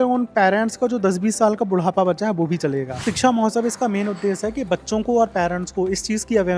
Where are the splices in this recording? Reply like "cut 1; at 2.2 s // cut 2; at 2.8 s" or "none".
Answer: cut 1; at 3.0 s